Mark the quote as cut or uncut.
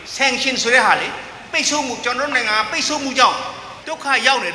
uncut